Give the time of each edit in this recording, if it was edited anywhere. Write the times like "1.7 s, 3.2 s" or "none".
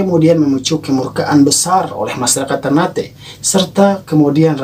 none